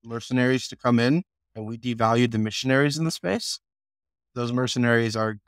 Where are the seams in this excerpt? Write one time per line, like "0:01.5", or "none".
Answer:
0:04.2